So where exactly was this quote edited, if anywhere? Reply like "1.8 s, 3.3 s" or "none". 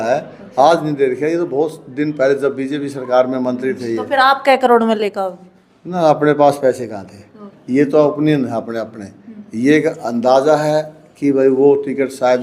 7.6 s